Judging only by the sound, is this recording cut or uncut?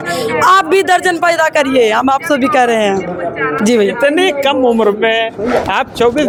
uncut